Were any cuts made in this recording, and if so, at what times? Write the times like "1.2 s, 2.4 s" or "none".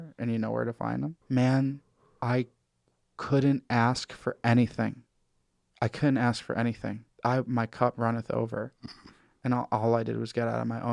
1.2 s, 7.1 s